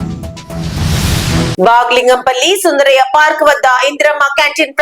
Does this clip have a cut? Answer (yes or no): yes